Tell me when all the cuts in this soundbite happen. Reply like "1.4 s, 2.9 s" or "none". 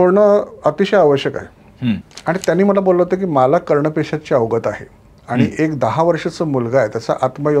2.1 s

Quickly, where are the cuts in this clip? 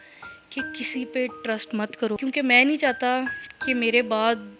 2.2 s

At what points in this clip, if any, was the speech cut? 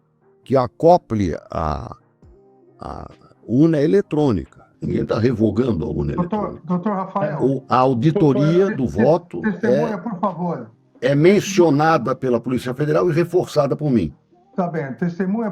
none

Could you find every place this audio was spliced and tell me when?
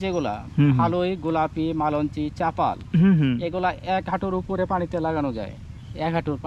none

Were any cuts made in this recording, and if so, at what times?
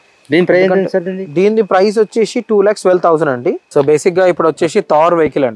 3.6 s

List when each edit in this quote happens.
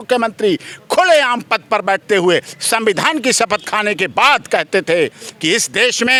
none

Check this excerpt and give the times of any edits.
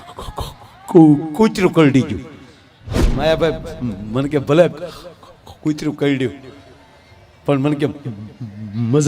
3.0 s

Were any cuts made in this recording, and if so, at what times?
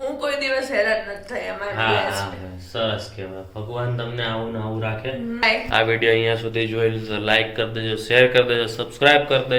5.4 s

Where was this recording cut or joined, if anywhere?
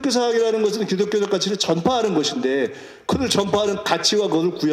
none

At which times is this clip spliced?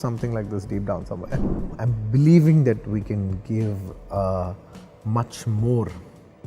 1.5 s

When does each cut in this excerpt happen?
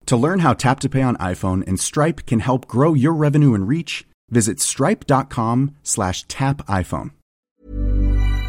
7.5 s

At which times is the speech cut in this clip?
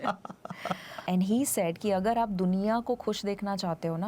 0.9 s

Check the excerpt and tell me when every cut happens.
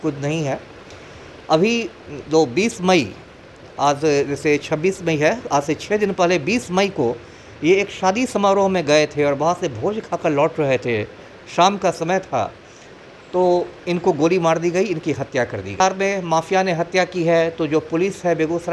15.8 s

